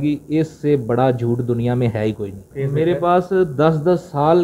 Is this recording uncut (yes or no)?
no